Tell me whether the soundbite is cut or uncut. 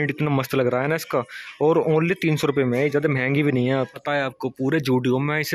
cut